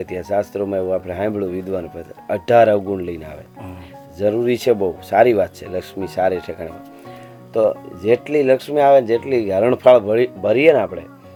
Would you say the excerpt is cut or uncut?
uncut